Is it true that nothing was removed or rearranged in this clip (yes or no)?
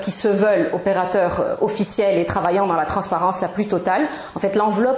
yes